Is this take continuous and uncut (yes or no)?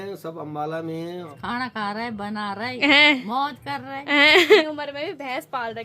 no